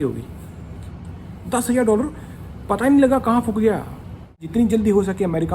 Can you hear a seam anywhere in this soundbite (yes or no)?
yes